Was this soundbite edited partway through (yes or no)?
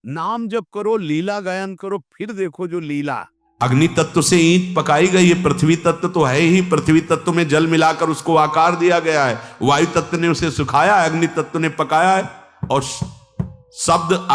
yes